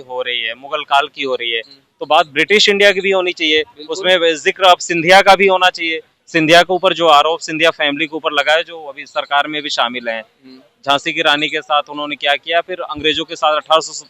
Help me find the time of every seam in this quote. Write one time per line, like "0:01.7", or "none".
none